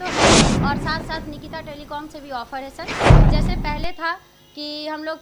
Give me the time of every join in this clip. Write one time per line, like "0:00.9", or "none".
0:01.0
0:02.9
0:03.6